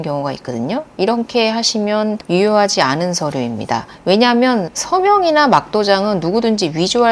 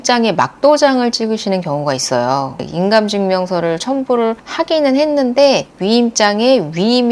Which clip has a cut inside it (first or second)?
first